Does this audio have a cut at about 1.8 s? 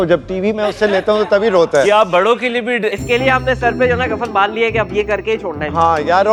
no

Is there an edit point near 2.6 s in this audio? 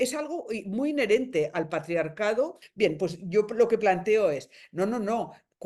yes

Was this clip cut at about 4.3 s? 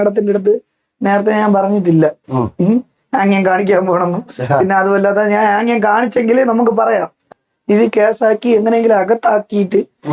no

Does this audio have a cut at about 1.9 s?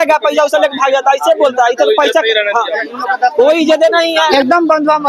no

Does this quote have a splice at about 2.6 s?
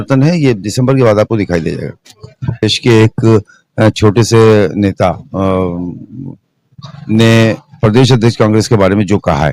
yes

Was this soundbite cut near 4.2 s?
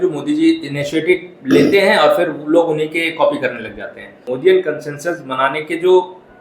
yes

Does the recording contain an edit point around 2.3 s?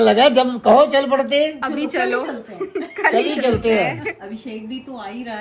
no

